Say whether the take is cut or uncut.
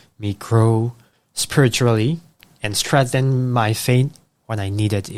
uncut